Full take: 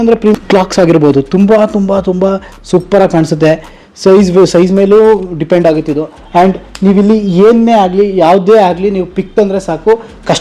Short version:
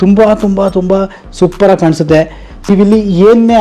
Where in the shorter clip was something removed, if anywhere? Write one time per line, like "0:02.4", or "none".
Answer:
0:02.7